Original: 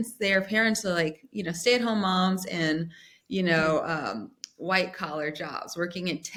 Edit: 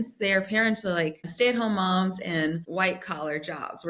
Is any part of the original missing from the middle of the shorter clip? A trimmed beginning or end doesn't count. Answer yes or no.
yes